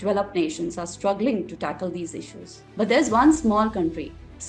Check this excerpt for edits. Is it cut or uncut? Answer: uncut